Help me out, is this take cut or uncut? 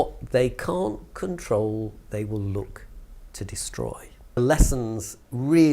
cut